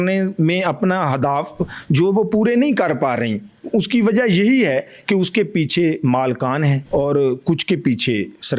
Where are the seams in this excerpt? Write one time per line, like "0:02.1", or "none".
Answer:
0:06.8